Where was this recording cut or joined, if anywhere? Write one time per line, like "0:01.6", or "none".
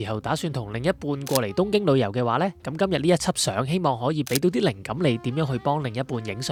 none